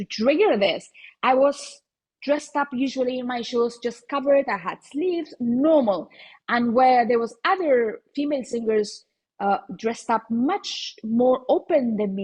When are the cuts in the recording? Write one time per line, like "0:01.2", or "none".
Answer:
none